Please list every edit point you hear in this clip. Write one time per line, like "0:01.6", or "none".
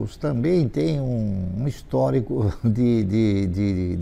none